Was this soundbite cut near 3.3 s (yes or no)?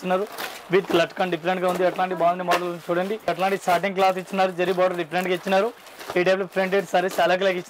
yes